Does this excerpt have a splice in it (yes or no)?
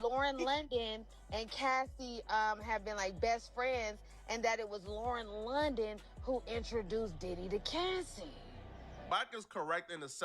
yes